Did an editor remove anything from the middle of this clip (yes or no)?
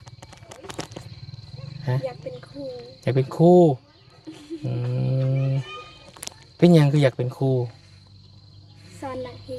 no